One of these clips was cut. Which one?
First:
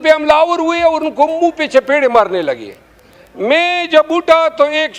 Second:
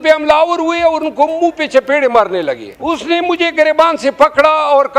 second; 1 cut; at 2.7 s

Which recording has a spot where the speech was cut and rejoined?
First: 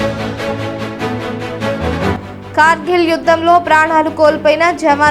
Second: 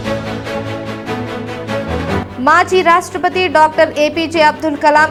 first; 1 cut; at 2.0 s

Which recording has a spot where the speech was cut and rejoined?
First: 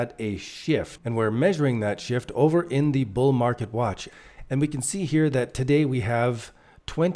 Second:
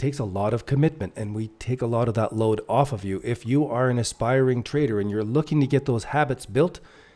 first; 2 cuts; at 1.0 s, 4.1 s

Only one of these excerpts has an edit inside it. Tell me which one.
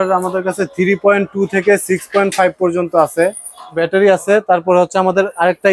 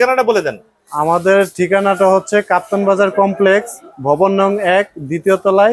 first; 1 cut; at 3.8 s

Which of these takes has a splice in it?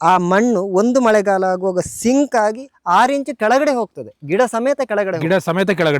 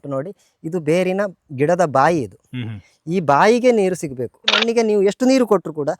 second; 1 cut; at 4.6 s

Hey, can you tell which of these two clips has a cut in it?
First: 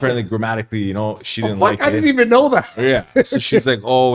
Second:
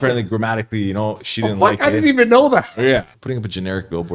second; 1 cut; at 3.1 s

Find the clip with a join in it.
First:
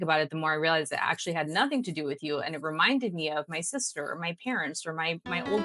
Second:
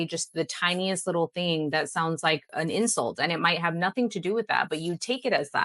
second; 1 cut; at 2.5 s

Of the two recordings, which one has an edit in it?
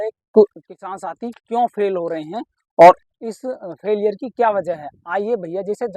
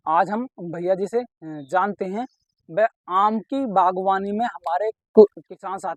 first; 1 cut; at 3.1 s

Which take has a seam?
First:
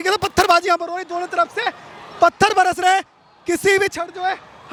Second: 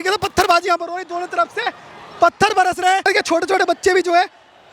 second; 1 cut; at 3.1 s

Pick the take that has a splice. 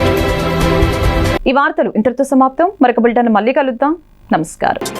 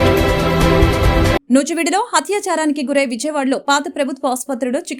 second; 1 cut; at 0.9 s

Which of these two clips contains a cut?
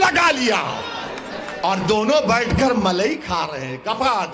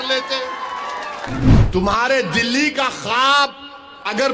second; 1 cut; at 1.5 s

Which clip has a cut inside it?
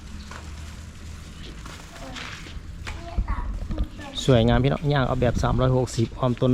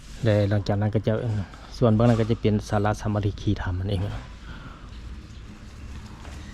second; 1 cut; at 4.9 s

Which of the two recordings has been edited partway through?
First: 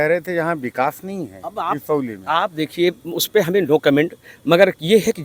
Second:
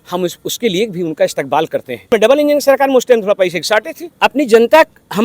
second; 2 cuts; at 2.1 s, 4.0 s

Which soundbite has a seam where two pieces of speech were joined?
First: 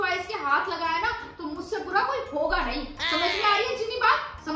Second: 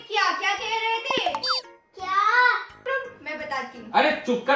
second; 1 cut; at 2.8 s

